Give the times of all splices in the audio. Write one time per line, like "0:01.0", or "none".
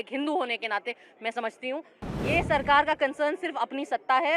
0:02.0

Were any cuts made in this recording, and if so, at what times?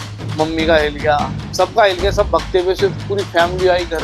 none

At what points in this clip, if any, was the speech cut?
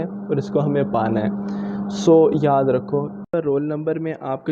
0:03.2

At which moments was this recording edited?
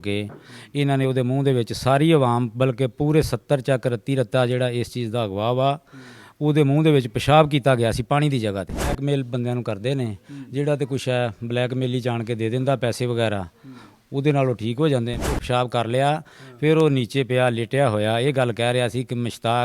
0:09.0
0:15.4

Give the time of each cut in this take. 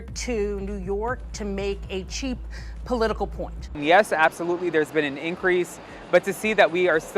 0:03.7

